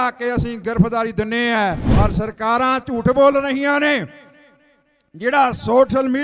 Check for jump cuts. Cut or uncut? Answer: cut